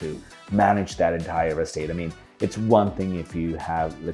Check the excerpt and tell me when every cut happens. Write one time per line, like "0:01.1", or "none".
none